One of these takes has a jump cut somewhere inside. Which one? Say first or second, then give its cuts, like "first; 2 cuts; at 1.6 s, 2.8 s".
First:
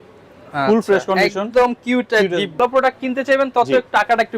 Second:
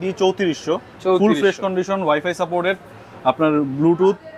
first; 1 cut; at 2.6 s